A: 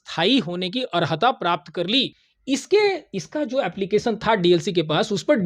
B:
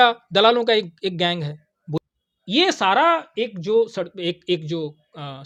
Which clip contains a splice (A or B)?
A